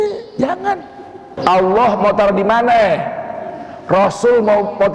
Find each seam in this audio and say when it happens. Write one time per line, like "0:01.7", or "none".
0:01.4